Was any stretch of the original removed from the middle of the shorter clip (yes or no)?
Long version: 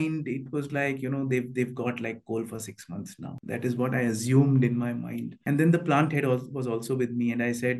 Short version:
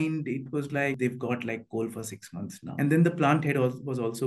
yes